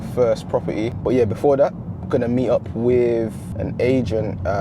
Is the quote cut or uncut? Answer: cut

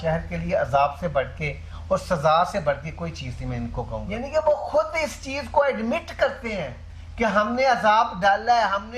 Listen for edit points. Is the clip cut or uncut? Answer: cut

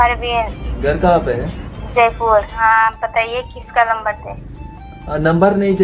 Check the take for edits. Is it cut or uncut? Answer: cut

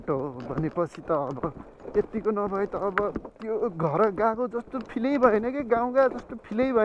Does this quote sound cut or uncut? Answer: uncut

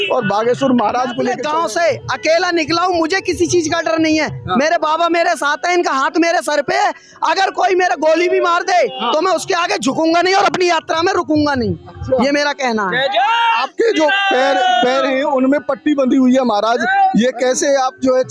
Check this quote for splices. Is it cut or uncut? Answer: cut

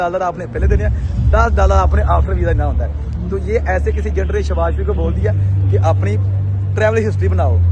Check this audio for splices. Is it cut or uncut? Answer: uncut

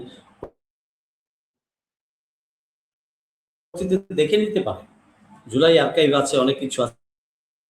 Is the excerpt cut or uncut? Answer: uncut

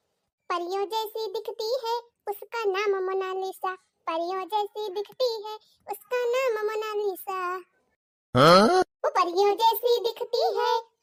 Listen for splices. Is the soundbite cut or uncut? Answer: uncut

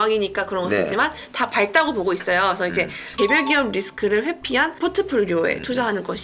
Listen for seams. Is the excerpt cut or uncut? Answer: cut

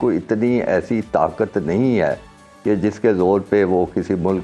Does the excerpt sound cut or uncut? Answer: uncut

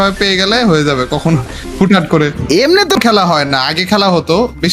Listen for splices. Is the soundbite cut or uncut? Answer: cut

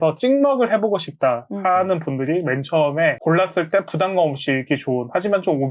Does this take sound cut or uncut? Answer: uncut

